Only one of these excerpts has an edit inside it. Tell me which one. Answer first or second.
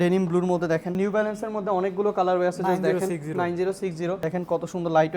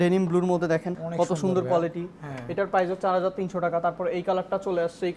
first